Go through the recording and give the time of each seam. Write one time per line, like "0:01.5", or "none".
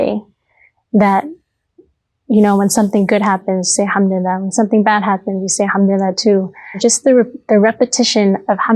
0:06.8